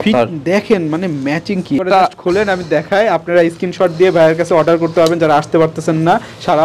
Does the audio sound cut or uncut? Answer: cut